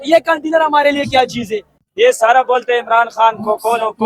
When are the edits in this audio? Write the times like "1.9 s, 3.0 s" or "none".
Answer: 1.8 s

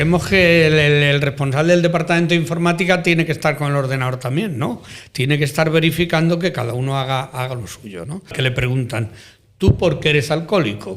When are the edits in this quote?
8.3 s

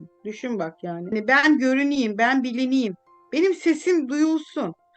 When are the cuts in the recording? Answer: 1.1 s

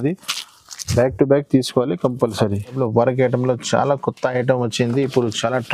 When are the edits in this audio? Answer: 2.8 s

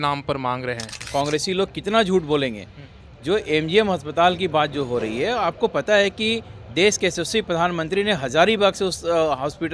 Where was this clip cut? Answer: 1.0 s

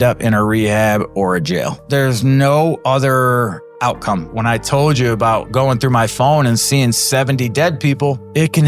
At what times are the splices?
4.3 s

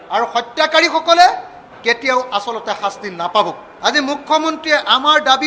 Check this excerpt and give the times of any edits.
3.6 s

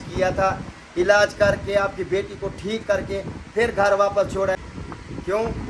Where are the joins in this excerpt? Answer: 4.6 s

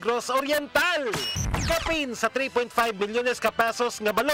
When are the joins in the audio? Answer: 1.4 s

